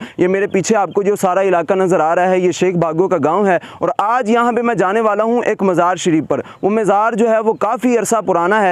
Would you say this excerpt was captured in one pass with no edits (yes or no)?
yes